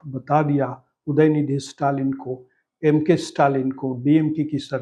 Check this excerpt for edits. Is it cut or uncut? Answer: uncut